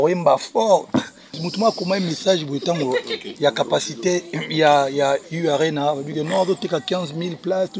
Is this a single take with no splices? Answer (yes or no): no